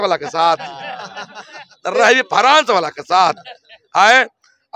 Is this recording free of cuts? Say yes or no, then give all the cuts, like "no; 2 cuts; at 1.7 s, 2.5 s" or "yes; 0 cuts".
yes; 0 cuts